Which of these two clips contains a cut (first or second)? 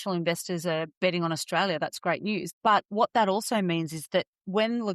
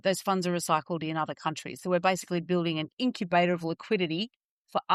first